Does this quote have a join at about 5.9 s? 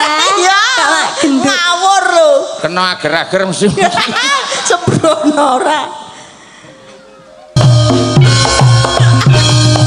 no; 1 cut; at 7.6 s

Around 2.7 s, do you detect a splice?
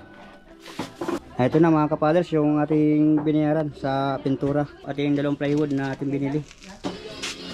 no; 3 cuts; at 1.2 s, 4.8 s, 6.7 s

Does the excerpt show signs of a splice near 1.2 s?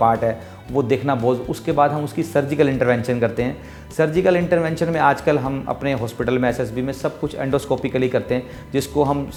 no; 0 cuts

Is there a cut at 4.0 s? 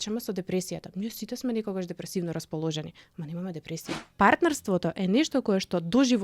yes; 1 cut; at 4.0 s

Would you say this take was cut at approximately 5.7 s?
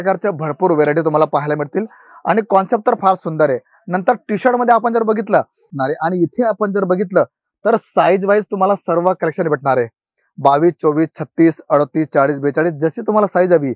yes; 1 cut; at 5.7 s

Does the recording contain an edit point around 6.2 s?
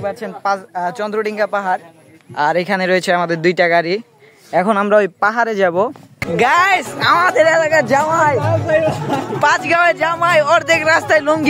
yes; 1 cut; at 6.2 s

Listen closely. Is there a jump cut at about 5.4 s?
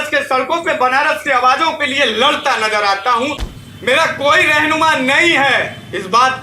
no; 1 cut; at 3.5 s

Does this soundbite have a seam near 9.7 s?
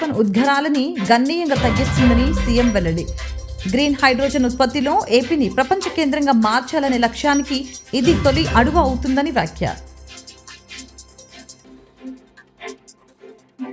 yes; 1 cut; at 9.7 s

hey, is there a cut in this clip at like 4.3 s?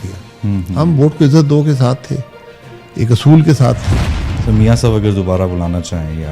yes; 1 cut; at 4.3 s

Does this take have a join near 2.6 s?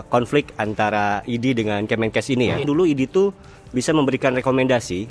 yes; 1 cut; at 2.6 s

